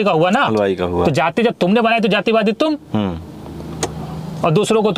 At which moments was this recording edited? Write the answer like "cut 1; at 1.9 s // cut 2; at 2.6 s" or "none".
none